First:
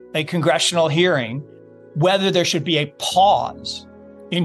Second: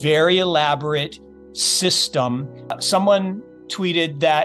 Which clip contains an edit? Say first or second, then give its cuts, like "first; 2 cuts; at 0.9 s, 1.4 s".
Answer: second; 1 cut; at 2.8 s